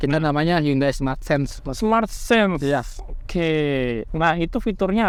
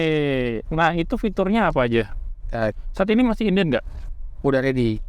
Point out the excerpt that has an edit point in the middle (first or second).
second